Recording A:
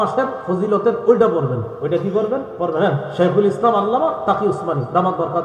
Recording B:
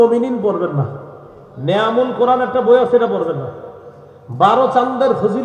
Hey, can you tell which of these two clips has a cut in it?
A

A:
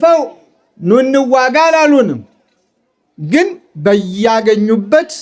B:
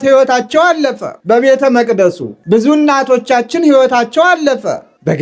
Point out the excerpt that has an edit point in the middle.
B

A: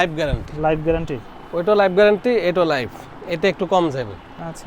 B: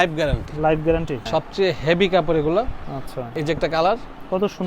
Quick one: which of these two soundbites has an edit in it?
B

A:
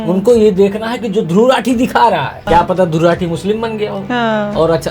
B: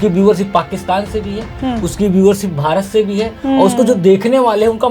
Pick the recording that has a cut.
A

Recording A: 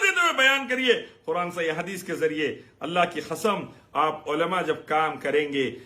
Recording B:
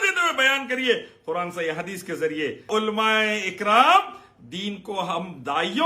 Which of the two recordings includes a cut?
B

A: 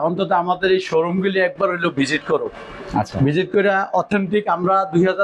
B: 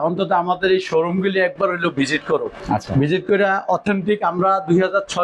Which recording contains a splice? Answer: B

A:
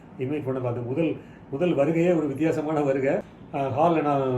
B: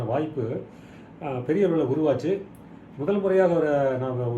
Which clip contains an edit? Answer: A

